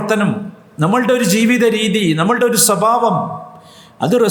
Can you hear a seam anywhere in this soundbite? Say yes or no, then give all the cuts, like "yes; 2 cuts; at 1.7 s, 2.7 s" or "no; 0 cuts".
no; 0 cuts